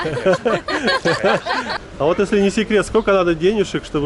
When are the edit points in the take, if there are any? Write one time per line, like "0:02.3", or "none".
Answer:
0:01.7